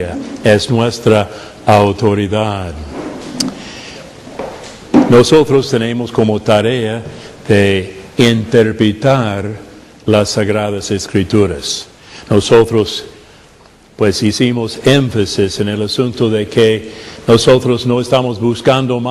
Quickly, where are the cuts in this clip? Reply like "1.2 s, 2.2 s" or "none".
1.9 s